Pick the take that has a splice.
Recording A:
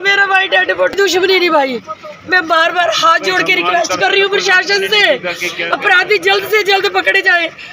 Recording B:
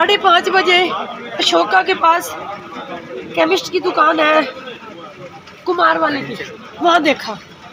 A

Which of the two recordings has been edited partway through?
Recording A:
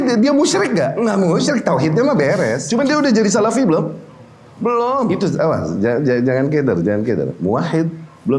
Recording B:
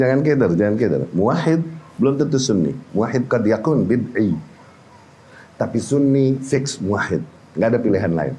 A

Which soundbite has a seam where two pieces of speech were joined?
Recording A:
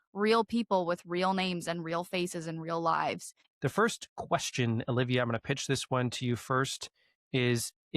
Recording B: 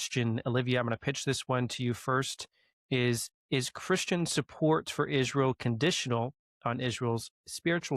A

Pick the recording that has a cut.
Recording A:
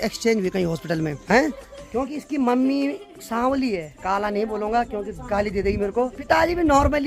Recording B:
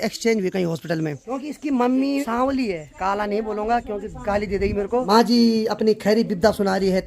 B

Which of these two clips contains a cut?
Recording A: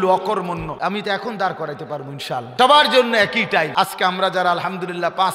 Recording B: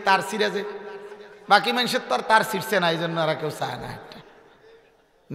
A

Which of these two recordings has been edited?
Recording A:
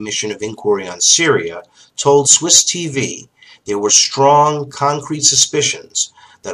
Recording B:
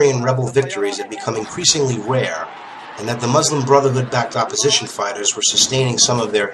A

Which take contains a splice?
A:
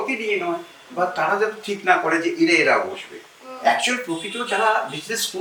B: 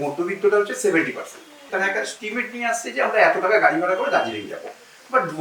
B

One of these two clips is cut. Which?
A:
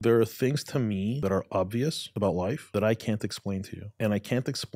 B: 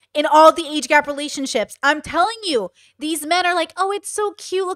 A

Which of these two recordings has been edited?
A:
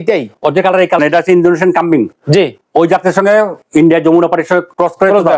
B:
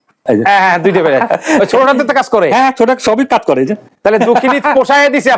A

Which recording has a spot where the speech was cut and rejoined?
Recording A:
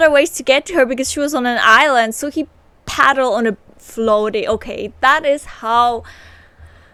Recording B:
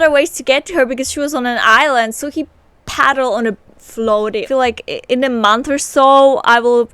B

